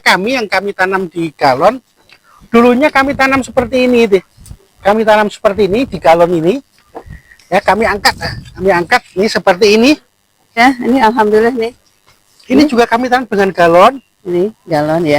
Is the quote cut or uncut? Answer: cut